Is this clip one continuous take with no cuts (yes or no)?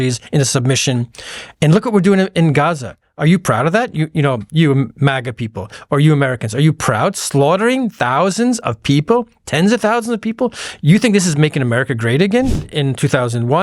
no